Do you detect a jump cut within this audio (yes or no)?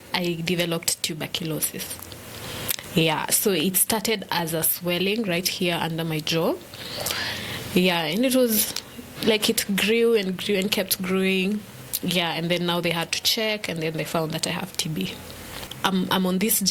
yes